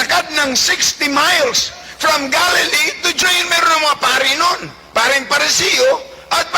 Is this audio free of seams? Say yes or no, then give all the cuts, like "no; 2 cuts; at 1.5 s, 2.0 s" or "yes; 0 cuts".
no; 1 cut; at 3.2 s